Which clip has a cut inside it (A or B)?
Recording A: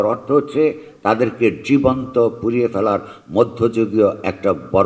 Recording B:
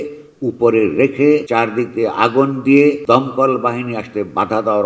B